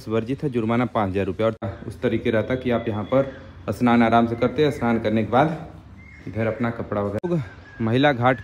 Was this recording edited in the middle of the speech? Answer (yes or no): yes